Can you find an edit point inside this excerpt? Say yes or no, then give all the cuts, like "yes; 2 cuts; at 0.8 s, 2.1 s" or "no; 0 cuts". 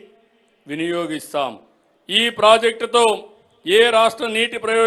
no; 0 cuts